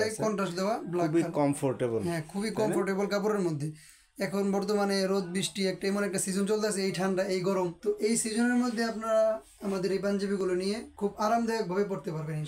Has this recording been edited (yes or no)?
no